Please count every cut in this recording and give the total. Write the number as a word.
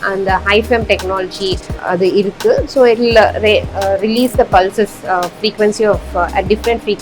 one